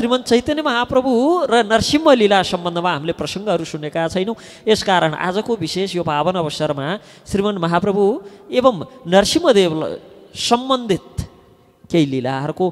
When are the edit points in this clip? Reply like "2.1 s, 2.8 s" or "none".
none